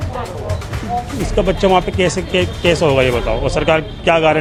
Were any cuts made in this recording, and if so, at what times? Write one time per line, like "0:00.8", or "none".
none